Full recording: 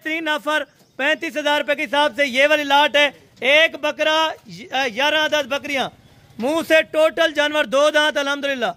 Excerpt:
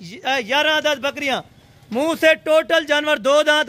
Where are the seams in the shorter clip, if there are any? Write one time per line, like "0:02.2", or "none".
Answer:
none